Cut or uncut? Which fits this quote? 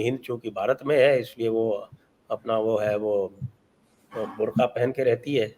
uncut